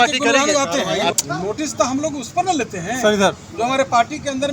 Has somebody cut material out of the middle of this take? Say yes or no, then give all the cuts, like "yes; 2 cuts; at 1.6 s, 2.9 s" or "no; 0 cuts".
yes; 1 cut; at 1.1 s